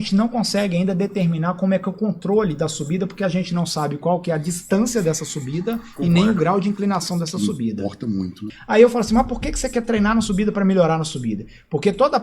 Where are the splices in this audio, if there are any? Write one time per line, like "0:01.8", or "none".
0:07.9